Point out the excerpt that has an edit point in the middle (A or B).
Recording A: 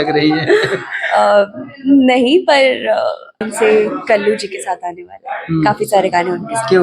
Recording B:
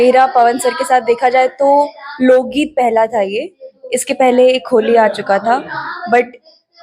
A